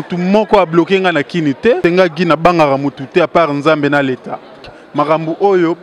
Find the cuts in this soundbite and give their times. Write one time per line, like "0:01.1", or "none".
0:01.8
0:04.7